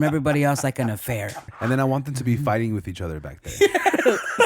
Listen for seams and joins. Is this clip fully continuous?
no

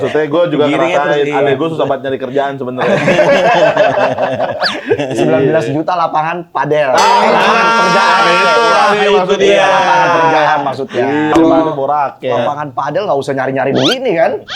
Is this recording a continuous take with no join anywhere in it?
no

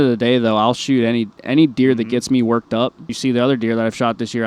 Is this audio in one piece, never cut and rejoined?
no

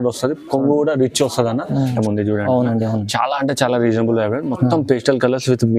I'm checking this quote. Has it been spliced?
yes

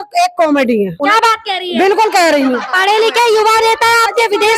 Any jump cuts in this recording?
yes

